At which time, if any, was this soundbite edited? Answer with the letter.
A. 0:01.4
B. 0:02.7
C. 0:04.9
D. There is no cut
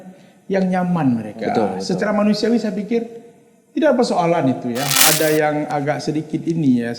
C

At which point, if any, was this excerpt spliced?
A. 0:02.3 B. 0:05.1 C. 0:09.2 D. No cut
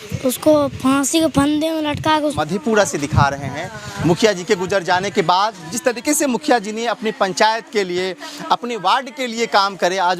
A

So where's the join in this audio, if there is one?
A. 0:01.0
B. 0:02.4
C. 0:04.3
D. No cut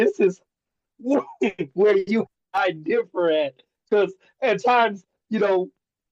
B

